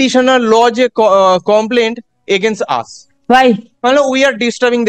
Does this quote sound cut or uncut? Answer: cut